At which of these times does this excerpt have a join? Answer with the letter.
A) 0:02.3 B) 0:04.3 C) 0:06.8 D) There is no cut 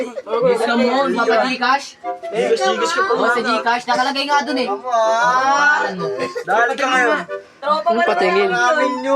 D